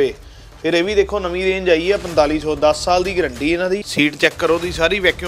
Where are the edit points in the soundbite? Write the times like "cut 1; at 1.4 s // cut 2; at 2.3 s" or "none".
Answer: cut 1; at 3.9 s